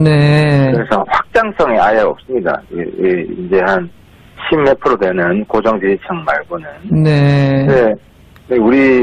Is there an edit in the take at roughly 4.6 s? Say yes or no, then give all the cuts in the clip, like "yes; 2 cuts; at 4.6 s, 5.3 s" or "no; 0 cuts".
yes; 1 cut; at 4.6 s